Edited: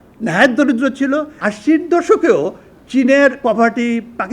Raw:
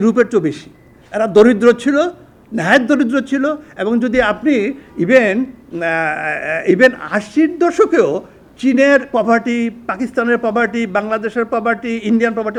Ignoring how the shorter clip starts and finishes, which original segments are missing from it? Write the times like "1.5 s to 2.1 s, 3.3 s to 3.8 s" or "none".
3.7 s to 7.0 s